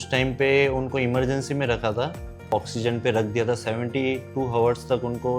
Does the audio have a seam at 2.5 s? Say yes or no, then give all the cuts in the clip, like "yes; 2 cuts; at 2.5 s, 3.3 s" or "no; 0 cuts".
yes; 1 cut; at 2.5 s